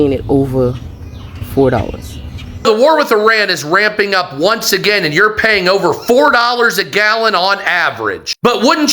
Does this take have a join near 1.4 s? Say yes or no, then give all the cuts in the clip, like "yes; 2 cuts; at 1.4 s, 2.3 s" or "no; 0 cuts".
no; 1 cut; at 2.6 s